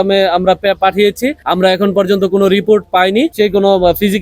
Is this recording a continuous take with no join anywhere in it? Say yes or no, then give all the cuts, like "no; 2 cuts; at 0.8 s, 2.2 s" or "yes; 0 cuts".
no; 1 cut; at 3.3 s